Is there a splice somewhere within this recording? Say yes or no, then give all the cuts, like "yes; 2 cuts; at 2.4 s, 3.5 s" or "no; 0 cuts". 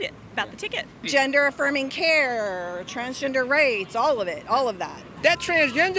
yes; 2 cuts; at 1.1 s, 5.1 s